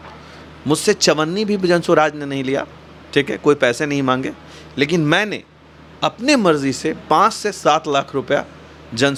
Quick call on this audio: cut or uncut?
uncut